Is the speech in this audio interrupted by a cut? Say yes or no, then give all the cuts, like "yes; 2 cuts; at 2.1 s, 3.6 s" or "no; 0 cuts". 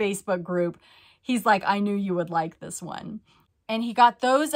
yes; 1 cut; at 3.4 s